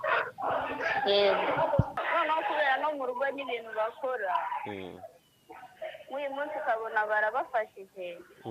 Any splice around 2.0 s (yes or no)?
yes